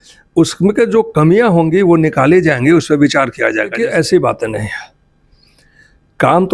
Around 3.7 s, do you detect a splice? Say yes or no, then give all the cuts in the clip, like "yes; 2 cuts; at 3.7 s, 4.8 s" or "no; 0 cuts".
yes; 1 cut; at 3.7 s